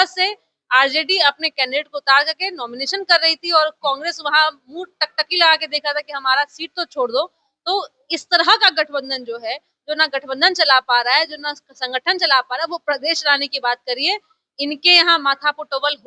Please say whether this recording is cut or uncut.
uncut